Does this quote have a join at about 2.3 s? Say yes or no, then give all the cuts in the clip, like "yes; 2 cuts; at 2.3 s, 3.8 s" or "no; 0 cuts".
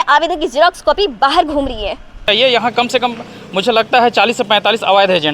yes; 1 cut; at 2.3 s